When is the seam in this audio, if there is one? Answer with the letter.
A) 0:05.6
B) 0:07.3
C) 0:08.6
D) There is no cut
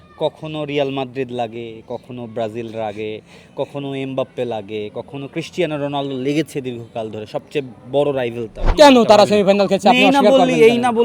C